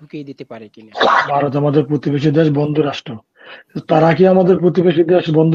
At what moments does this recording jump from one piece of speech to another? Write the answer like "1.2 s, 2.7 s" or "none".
1.3 s